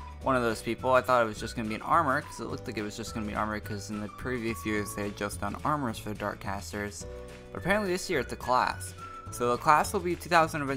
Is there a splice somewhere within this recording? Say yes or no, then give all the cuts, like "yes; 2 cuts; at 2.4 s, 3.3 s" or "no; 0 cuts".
yes; 1 cut; at 4.7 s